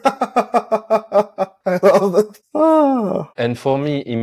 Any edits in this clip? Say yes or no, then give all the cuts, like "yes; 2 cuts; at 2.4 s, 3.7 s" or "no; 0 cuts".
yes; 2 cuts; at 1.6 s, 3.3 s